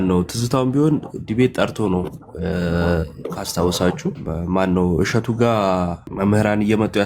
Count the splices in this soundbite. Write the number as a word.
two